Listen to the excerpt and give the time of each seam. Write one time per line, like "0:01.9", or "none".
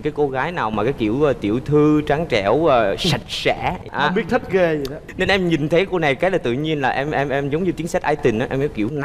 none